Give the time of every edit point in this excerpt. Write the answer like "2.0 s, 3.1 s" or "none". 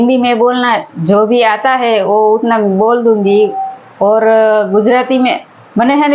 none

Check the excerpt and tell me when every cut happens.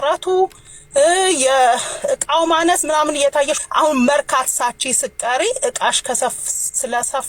3.6 s

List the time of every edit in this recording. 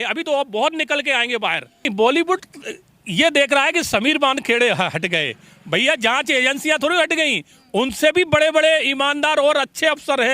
1.9 s

